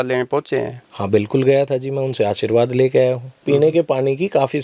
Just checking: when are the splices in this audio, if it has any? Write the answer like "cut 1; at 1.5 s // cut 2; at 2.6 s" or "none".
cut 1; at 3.4 s